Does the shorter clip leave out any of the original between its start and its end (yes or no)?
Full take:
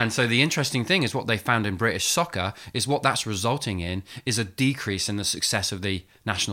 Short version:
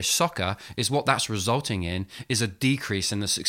no